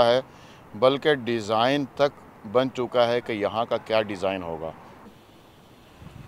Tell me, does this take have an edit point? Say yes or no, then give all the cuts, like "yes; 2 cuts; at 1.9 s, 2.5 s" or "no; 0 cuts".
yes; 1 cut; at 4.9 s